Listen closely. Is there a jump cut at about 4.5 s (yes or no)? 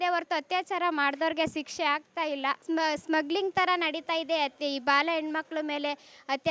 no